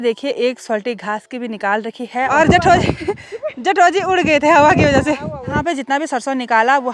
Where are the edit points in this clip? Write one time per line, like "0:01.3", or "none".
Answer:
0:02.3
0:05.6